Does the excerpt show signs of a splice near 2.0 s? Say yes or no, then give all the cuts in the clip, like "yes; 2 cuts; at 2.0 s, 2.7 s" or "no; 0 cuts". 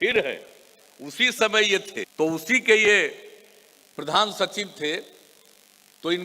yes; 1 cut; at 2.0 s